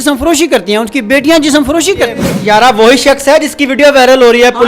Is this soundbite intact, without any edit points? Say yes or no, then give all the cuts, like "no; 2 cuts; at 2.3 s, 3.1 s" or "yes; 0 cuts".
no; 1 cut; at 2.2 s